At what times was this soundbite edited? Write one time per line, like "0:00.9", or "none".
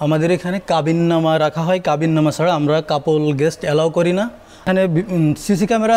none